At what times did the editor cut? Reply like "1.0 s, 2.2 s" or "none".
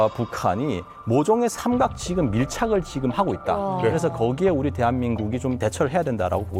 none